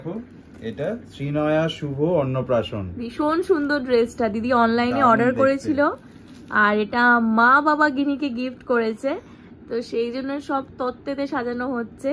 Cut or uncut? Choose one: uncut